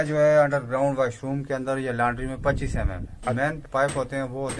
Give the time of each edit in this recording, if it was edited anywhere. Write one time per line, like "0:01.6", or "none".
0:03.6